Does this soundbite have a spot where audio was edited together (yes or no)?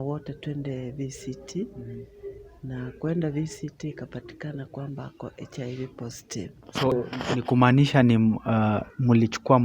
yes